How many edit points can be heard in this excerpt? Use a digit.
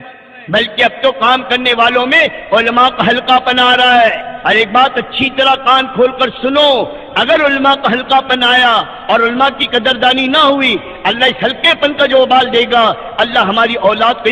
1